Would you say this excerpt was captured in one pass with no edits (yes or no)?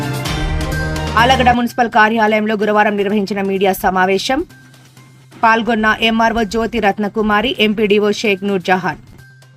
no